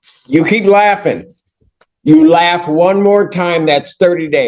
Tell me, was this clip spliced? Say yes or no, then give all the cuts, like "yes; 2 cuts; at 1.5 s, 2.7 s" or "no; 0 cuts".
no; 0 cuts